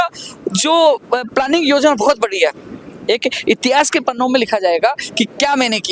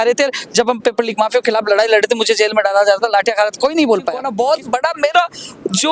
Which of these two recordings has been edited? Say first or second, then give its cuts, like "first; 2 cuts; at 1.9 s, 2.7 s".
second; 1 cut; at 4.3 s